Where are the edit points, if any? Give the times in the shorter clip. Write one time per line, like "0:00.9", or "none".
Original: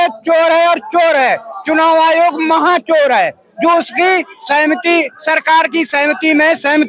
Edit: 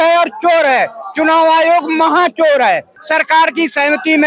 0:03.0